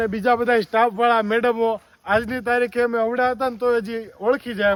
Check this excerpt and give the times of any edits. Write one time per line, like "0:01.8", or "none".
none